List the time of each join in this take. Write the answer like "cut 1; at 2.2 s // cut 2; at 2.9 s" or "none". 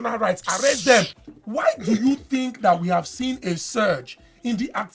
cut 1; at 1.2 s